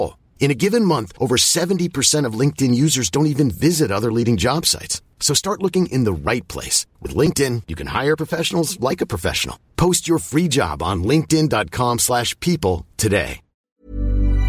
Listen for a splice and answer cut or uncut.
cut